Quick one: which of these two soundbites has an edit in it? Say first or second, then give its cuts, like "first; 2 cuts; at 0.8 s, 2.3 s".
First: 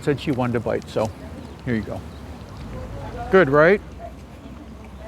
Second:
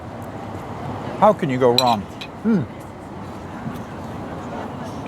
first; 1 cut; at 2.5 s